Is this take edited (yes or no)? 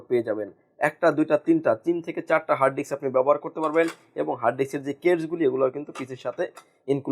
no